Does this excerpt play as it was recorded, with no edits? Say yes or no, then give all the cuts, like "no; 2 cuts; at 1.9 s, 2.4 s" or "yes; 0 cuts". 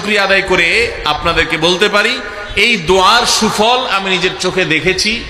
yes; 0 cuts